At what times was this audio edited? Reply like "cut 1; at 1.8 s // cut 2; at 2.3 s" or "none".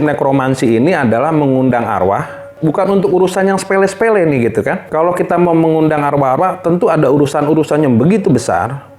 cut 1; at 2.5 s // cut 2; at 4.9 s